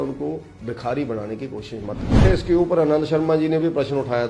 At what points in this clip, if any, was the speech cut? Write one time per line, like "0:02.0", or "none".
0:02.2